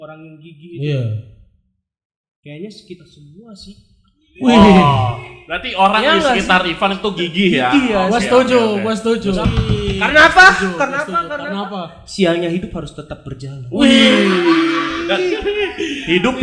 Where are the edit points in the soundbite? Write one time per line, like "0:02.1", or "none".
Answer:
0:09.4